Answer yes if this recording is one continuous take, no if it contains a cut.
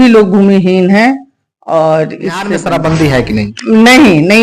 no